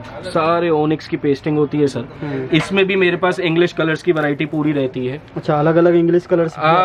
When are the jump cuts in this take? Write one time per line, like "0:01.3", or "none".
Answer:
none

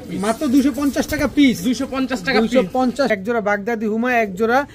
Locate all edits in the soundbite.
0:03.1

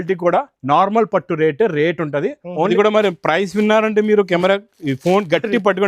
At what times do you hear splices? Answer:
0:02.7

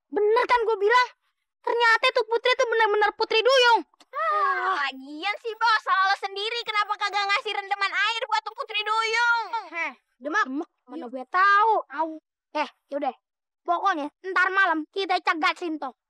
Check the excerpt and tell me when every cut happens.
none

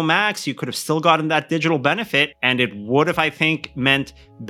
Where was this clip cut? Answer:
0:02.4

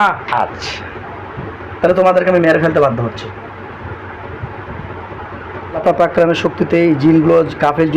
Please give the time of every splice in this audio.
0:05.8

